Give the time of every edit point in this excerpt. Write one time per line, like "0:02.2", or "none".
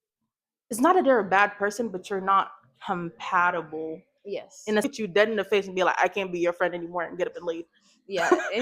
0:04.9